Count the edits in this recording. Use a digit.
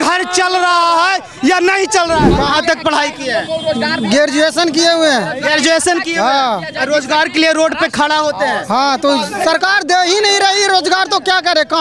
1